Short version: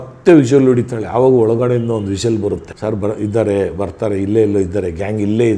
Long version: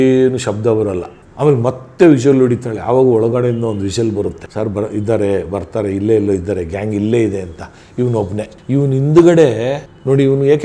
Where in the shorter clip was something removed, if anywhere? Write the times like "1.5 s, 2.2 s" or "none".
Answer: none